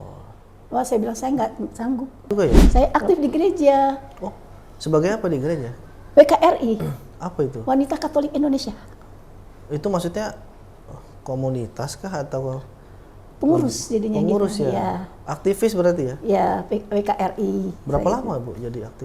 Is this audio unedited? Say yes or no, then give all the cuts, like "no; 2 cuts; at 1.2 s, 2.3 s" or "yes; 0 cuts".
no; 1 cut; at 2.6 s